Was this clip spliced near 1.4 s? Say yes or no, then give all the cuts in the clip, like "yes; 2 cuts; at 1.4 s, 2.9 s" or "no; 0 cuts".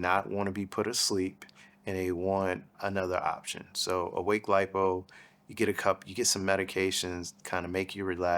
no; 1 cut; at 2.7 s